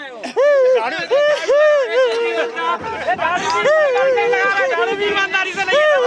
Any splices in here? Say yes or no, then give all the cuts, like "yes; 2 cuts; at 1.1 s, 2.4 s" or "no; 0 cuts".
no; 0 cuts